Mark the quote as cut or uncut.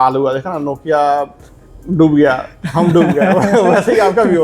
uncut